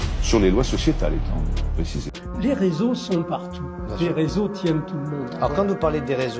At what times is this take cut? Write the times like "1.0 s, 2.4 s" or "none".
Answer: 2.2 s